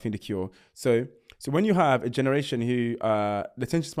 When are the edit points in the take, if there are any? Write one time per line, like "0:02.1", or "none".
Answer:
none